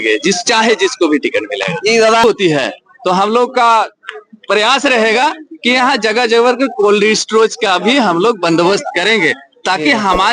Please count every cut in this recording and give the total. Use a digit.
1